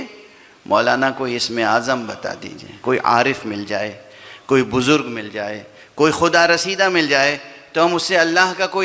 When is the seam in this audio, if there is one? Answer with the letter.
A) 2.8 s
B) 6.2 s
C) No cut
A